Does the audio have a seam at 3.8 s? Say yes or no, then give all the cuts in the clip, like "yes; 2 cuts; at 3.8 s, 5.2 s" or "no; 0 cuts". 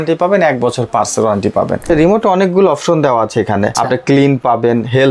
yes; 2 cuts; at 1.8 s, 3.8 s